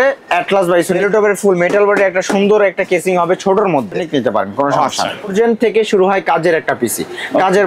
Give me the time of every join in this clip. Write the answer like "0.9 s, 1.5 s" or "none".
1.0 s, 4.0 s, 5.3 s

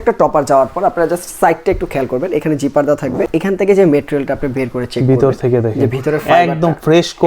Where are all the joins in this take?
3.3 s

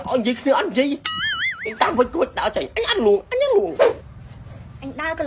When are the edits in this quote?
3.9 s

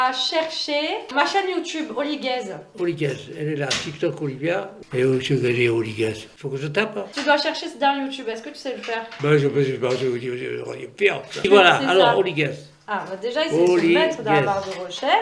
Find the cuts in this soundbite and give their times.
none

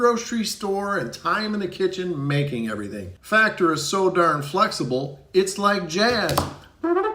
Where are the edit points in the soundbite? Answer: 3.1 s

